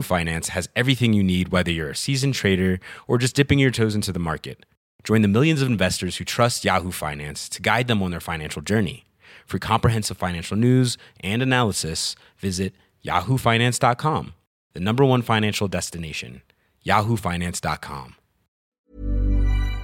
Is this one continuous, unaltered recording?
no; 1 cut; at 18.8 s

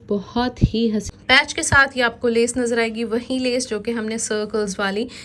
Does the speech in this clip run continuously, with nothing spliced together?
no; 1 cut; at 1.1 s

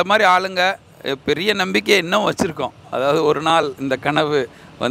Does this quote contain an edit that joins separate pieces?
no; 0 cuts

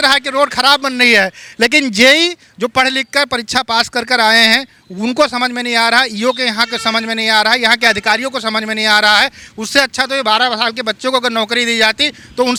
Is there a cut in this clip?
no; 0 cuts

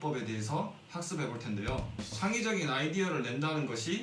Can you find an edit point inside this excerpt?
yes; 1 cut; at 2.2 s

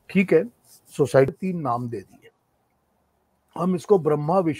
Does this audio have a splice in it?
yes; 1 cut; at 1.3 s

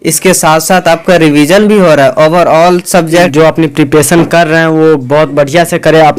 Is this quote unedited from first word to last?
no; 1 cut; at 3.3 s

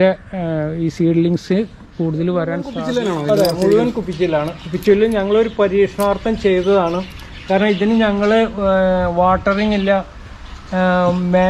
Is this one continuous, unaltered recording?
no; 1 cut; at 2.7 s

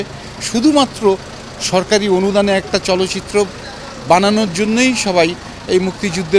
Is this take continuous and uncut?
yes; 0 cuts

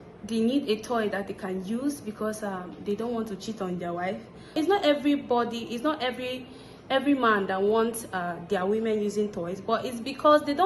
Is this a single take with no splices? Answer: no; 1 cut; at 4.5 s

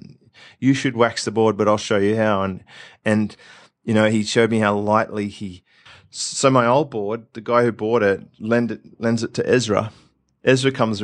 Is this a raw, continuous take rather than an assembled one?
no; 1 cut; at 6.0 s

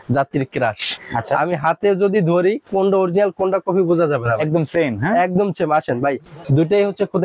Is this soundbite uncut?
no; 2 cuts; at 0.9 s, 6.3 s

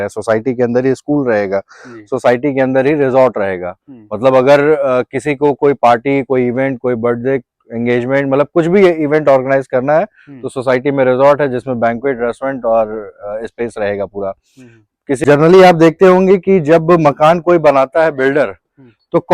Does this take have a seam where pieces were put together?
yes; 1 cut; at 15.2 s

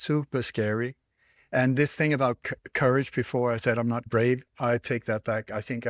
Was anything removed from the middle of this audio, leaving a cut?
no; 0 cuts

